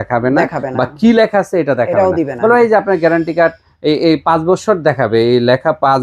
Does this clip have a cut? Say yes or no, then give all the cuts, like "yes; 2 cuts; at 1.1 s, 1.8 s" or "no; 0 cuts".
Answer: no; 0 cuts